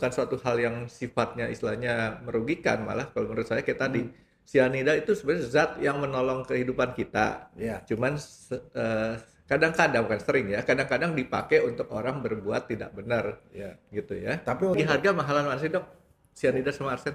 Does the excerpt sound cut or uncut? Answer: cut